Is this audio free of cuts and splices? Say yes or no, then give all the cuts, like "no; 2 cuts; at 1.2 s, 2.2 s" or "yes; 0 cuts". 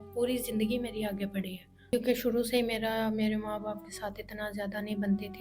no; 1 cut; at 1.9 s